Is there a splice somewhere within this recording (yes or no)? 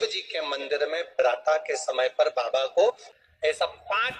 yes